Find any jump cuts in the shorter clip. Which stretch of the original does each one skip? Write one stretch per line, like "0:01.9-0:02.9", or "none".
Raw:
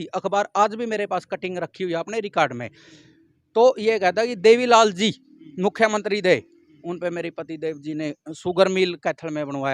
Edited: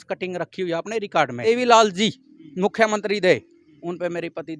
0:02.7-0:04.5